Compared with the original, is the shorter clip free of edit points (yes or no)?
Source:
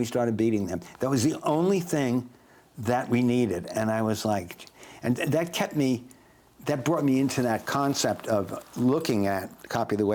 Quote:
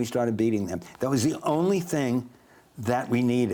yes